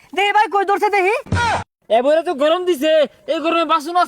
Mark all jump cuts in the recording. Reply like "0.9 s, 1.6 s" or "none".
1.6 s